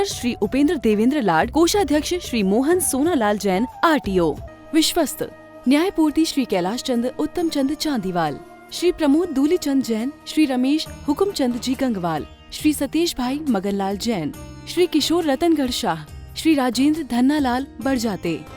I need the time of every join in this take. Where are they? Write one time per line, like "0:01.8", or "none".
0:04.5